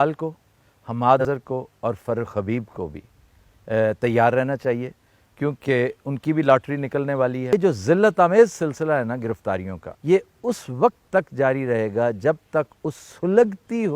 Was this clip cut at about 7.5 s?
yes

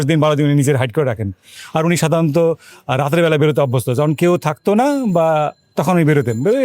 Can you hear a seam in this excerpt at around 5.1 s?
no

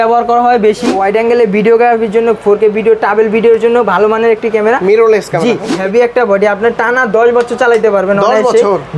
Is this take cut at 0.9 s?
yes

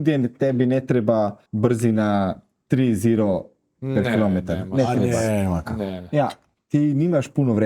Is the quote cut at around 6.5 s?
yes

